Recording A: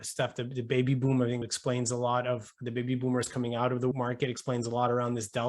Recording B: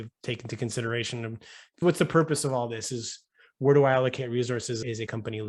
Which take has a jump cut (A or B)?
A